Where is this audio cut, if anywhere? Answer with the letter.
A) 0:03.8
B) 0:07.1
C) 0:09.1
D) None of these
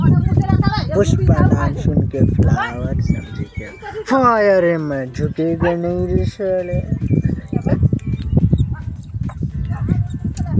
D